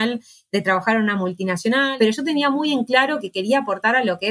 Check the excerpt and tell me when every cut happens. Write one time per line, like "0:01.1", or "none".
0:01.9